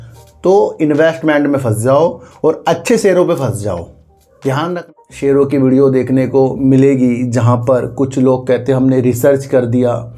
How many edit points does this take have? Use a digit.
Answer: 1